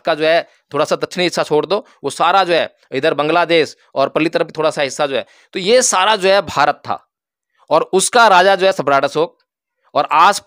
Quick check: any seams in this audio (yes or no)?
no